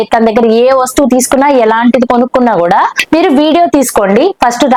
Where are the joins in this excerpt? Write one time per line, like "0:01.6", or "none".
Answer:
none